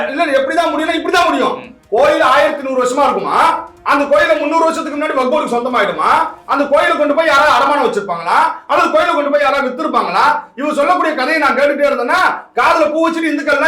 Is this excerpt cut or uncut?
uncut